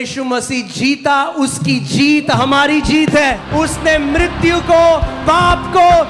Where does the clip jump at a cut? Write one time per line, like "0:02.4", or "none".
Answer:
0:03.4

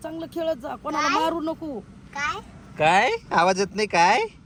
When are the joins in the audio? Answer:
none

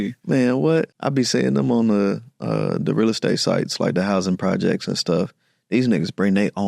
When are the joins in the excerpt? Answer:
0:01.0

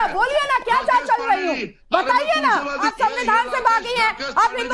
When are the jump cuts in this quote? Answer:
0:02.9

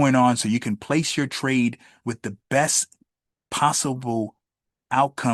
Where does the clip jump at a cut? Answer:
none

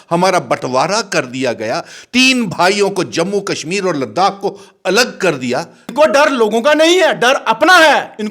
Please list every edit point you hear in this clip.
0:05.9

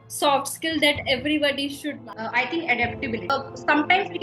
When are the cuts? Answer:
0:02.1
0:03.3

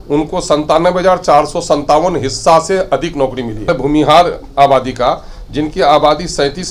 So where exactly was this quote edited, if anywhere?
0:03.7

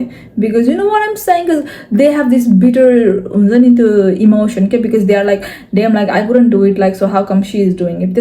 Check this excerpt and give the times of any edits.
none

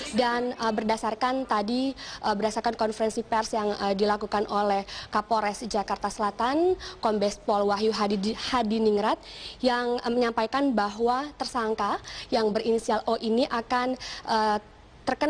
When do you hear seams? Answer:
0:13.3

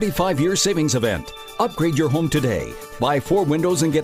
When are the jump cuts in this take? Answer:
none

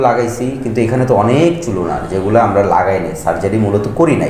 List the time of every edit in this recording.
none

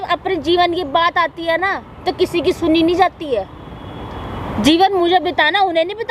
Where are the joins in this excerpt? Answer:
none

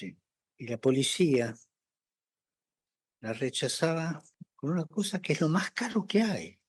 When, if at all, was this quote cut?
none

